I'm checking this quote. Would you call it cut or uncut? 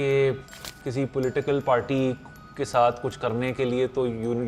uncut